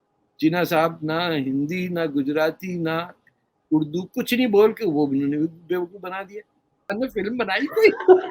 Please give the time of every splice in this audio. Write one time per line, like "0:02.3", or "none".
0:06.9